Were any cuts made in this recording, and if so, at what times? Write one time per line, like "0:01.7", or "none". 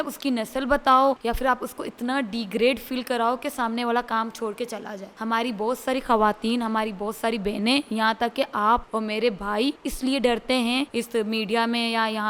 0:01.2
0:05.0
0:08.9
0:09.9
0:10.9

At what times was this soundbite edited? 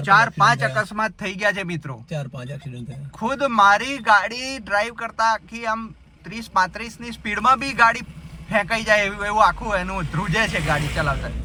none

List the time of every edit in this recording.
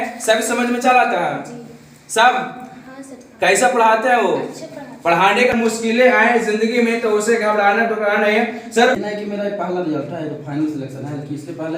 0:05.5
0:09.0

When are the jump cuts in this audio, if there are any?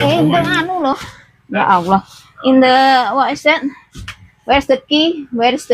none

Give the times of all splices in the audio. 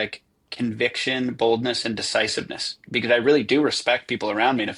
none

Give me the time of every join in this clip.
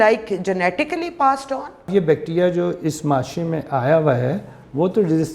0:01.9

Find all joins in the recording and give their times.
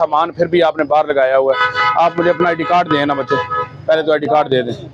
none

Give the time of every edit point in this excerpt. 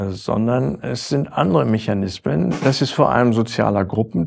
0:02.6

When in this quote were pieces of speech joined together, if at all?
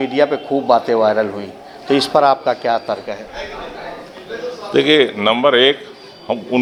none

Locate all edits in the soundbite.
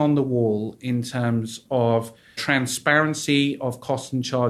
0:02.4

